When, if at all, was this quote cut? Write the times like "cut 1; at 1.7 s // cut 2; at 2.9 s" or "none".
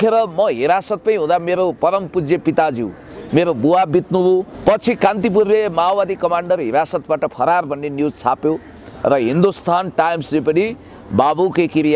cut 1; at 4.5 s